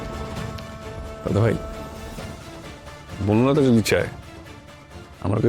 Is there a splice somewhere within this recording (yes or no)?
no